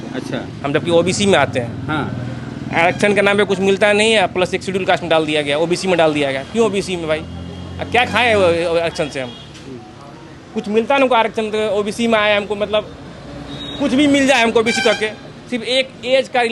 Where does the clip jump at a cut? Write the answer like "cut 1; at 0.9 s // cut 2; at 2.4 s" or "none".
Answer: none